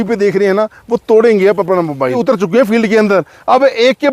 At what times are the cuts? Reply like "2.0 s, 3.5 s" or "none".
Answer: 2.2 s